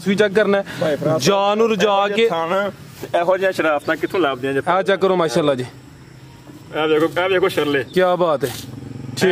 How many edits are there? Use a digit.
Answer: 0